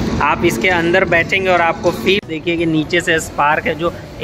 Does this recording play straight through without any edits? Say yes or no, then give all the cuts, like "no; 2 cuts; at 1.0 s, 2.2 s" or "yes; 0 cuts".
no; 1 cut; at 2.2 s